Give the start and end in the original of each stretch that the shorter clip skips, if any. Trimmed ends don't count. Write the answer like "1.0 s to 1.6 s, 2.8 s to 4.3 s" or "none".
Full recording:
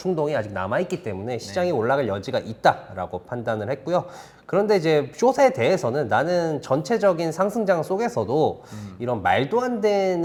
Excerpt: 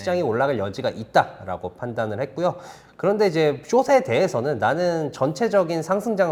none